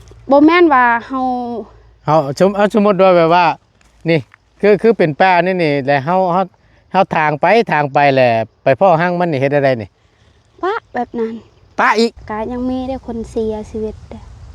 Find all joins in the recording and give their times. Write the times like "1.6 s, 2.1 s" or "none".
12.2 s

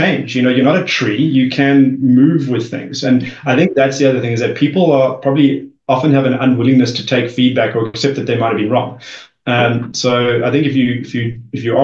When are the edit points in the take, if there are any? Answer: none

